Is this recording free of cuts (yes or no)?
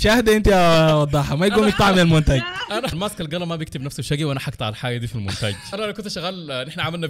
no